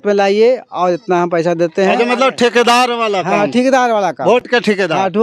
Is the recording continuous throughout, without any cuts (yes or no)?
yes